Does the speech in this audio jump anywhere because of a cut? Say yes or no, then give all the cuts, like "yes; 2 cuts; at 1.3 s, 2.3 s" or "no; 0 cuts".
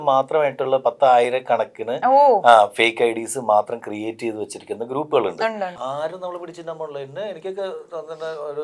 yes; 1 cut; at 5.8 s